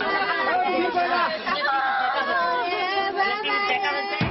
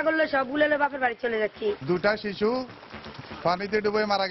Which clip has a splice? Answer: second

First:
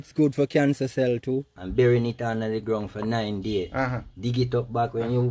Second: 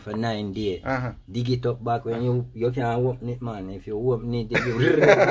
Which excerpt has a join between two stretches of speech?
first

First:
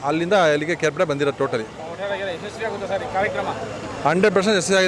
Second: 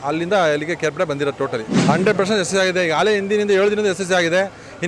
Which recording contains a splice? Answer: second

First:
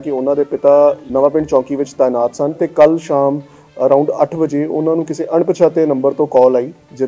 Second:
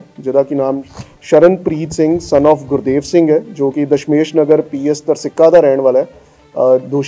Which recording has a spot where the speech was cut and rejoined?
first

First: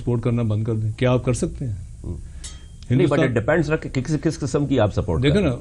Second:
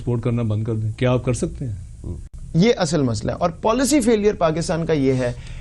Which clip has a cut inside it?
second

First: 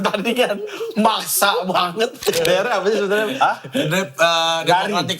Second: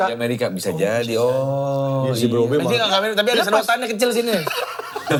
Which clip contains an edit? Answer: first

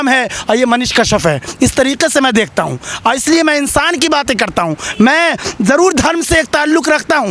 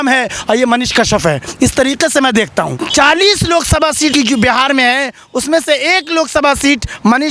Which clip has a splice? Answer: second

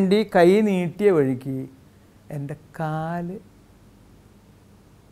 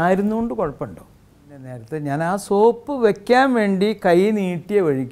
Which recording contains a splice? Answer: second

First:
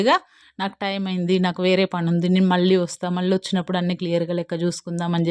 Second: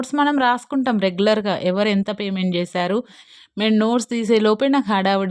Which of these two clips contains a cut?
second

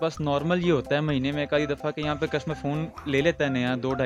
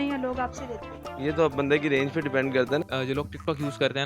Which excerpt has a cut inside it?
second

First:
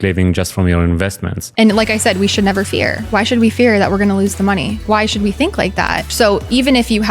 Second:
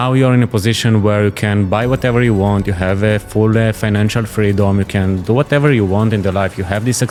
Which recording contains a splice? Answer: first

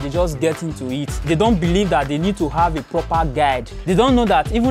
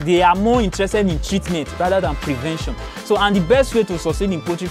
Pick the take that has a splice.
first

